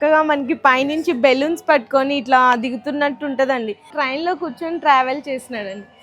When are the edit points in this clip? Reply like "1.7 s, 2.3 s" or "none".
3.9 s